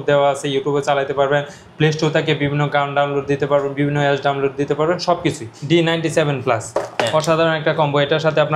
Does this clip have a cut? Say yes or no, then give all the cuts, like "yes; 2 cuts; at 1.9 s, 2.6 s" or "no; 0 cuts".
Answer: yes; 1 cut; at 5.5 s